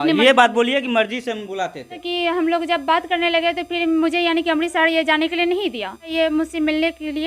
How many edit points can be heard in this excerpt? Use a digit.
2